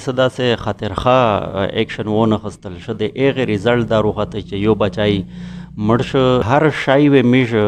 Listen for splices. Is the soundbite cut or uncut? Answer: cut